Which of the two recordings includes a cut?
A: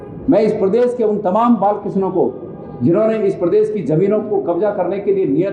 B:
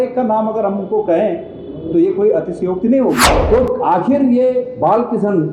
B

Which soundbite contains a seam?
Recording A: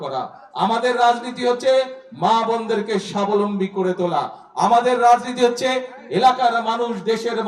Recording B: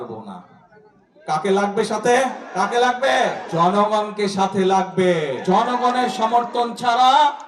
B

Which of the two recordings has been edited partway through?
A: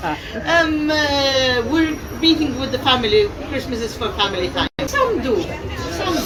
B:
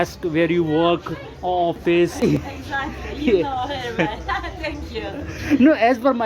B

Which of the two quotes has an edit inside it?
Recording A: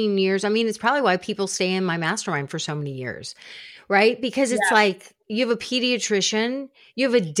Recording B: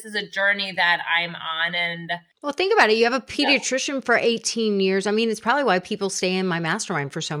B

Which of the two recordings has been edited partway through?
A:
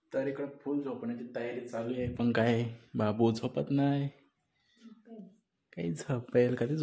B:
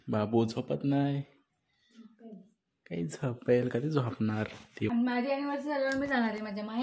B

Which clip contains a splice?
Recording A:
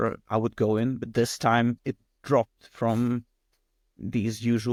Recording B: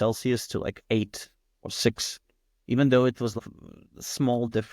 B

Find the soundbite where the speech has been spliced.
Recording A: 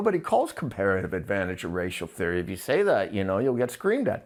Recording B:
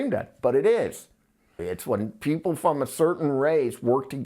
B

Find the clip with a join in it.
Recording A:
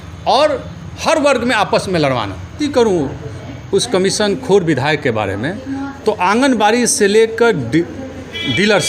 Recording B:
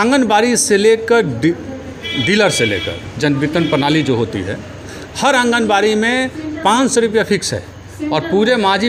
A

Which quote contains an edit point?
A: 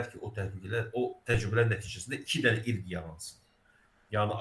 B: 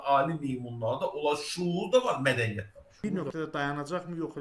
B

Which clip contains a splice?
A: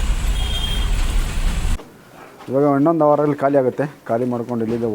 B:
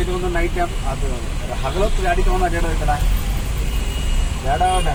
A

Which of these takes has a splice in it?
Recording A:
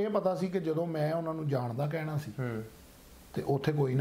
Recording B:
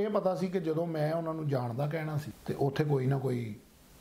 B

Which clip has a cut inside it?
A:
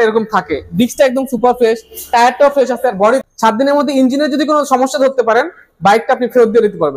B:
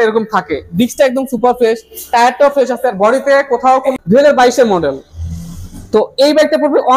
A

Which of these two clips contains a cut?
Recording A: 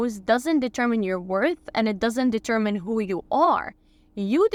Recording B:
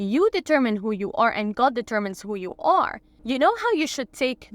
B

